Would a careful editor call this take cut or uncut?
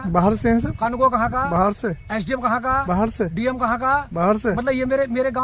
uncut